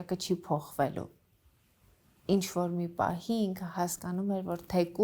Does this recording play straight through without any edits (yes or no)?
yes